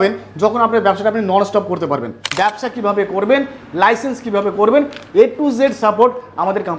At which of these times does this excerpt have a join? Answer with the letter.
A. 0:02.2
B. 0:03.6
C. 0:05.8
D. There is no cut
A